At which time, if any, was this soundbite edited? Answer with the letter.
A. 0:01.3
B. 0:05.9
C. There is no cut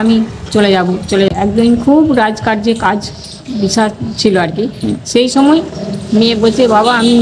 A